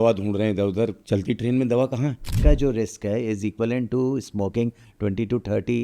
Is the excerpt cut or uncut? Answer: cut